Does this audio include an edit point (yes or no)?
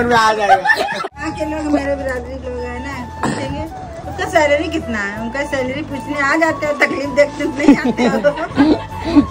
yes